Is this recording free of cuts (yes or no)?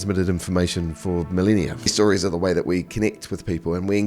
no